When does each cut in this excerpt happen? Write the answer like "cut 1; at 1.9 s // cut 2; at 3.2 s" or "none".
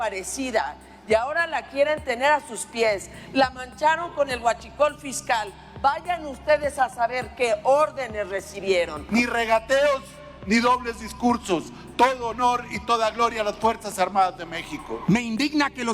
cut 1; at 9.0 s // cut 2; at 14.9 s